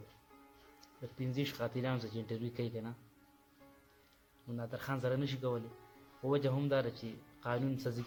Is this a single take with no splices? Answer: yes; 0 cuts

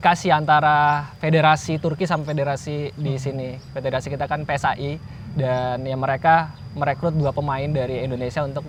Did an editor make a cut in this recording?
no; 0 cuts

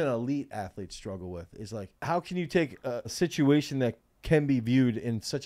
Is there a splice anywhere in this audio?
yes; 2 cuts; at 1.9 s, 3.1 s

